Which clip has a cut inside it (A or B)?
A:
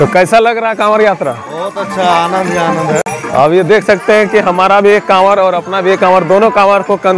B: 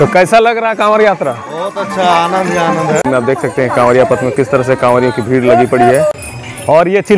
B